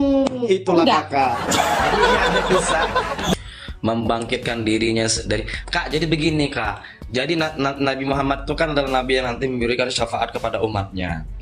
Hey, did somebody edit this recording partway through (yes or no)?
yes